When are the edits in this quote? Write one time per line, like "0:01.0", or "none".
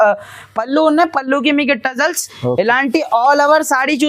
none